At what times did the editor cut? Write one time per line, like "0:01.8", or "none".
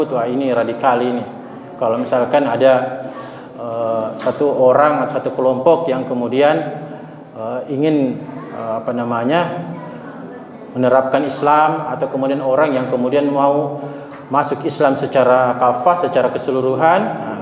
none